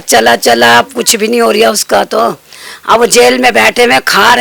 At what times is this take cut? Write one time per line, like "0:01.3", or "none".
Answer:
none